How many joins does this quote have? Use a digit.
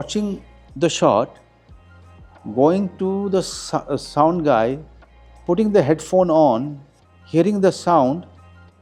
0